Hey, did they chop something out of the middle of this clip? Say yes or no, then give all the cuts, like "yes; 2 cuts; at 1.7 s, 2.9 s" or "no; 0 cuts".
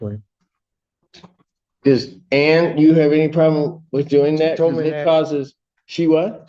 no; 0 cuts